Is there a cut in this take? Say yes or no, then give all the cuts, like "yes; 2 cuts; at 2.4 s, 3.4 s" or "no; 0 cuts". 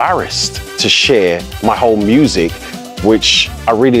no; 0 cuts